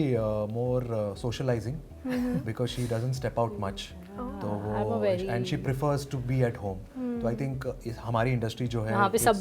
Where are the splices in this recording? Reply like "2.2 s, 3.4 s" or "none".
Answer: none